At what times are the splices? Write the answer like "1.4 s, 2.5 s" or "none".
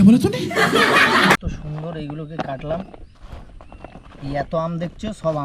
1.5 s